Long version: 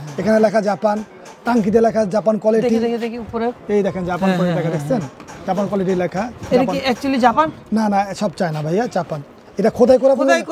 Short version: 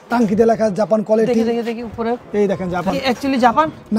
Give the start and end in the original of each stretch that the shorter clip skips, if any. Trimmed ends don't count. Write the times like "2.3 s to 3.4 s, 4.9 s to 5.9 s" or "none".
4.3 s to 6.7 s